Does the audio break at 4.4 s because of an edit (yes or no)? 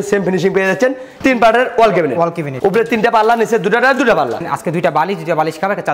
yes